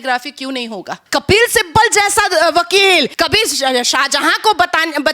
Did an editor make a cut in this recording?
yes; 2 cuts; at 1.0 s, 3.1 s

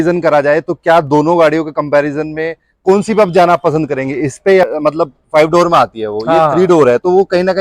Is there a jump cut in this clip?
yes; 1 cut; at 4.7 s

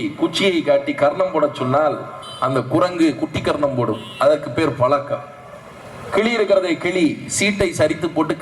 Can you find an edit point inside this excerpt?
no; 0 cuts

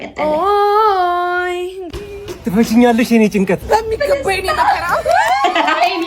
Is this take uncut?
yes; 0 cuts

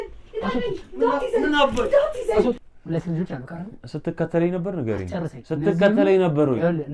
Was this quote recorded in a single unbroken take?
no; 1 cut; at 2.7 s

